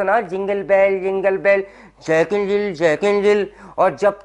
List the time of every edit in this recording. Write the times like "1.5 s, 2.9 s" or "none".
none

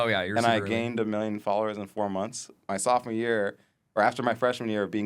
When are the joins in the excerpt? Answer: 2.5 s

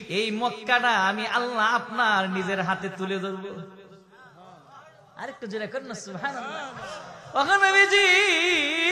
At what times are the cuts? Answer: none

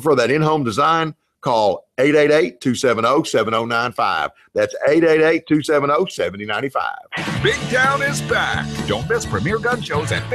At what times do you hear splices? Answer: 7.0 s, 9.3 s

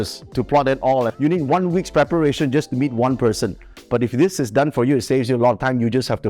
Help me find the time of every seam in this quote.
1.1 s

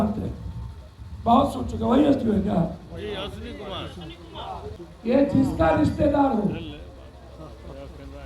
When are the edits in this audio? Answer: 4.7 s

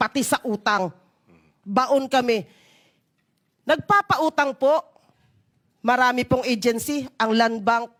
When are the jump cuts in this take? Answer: none

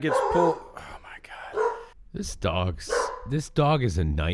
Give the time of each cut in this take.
1.9 s

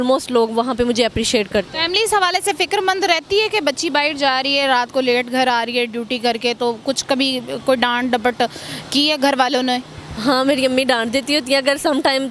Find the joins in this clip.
none

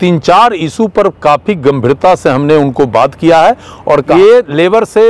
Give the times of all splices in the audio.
4.1 s

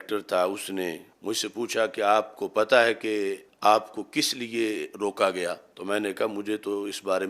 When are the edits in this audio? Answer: 1.1 s, 3.5 s, 5.7 s

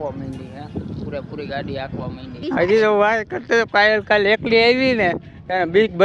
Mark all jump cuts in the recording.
2.4 s

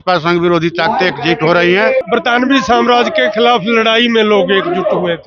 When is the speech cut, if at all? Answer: 2.1 s

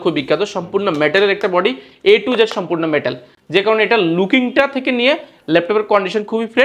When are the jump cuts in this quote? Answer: none

